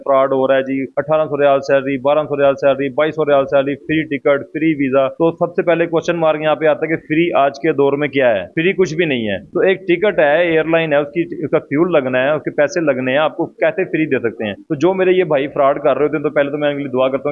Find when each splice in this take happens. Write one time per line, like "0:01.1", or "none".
none